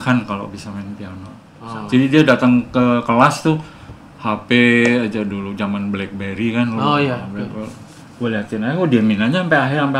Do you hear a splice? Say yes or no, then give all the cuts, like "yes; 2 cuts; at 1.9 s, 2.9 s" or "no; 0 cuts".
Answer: yes; 1 cut; at 1.5 s